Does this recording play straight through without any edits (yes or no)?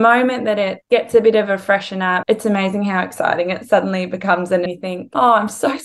no